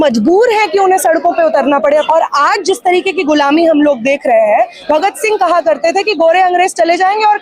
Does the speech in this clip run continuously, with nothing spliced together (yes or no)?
no